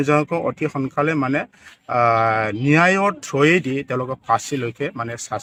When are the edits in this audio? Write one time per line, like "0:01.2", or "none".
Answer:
none